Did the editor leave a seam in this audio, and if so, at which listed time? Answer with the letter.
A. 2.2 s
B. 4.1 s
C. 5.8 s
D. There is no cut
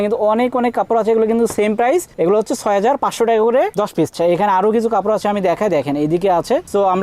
B